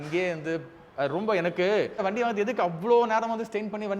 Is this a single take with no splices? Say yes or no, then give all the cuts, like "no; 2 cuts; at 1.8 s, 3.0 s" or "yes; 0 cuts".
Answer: no; 1 cut; at 2.0 s